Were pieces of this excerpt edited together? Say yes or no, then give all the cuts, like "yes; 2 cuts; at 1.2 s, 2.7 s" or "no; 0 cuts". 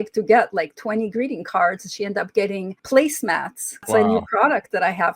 yes; 2 cuts; at 2.7 s, 3.9 s